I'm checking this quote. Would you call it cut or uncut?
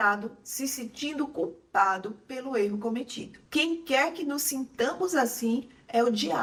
uncut